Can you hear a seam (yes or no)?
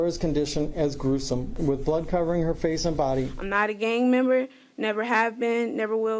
yes